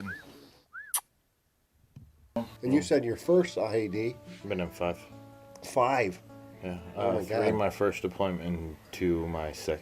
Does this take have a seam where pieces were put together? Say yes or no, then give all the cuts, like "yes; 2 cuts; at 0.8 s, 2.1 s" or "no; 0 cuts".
yes; 1 cut; at 2.4 s